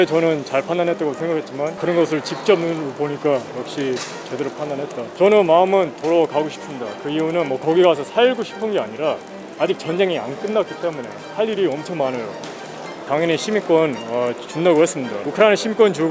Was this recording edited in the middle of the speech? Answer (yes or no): yes